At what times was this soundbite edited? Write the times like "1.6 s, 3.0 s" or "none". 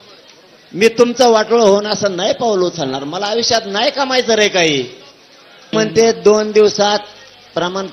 5.7 s